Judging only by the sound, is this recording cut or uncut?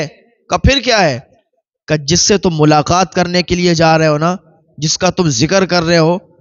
uncut